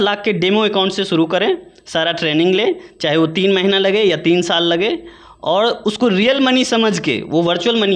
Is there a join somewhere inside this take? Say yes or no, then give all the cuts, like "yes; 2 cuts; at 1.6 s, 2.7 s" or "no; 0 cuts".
no; 0 cuts